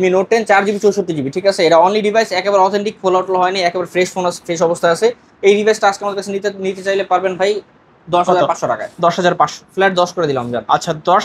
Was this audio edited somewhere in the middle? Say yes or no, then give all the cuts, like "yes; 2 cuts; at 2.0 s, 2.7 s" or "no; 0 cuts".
no; 0 cuts